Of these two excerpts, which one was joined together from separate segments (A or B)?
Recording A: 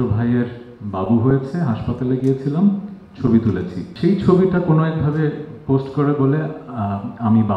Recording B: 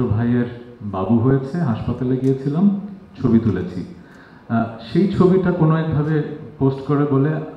A